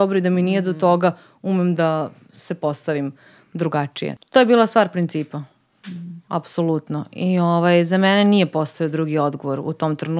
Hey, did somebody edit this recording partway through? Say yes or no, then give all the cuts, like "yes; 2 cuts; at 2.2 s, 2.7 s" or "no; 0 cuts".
yes; 1 cut; at 4.2 s